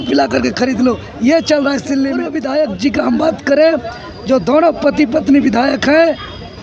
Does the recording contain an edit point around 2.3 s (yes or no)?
yes